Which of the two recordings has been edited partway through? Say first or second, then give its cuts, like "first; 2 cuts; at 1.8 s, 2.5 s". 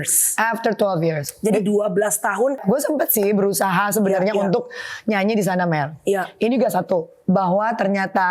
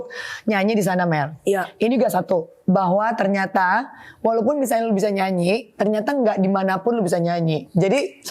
first; 1 cut; at 2.6 s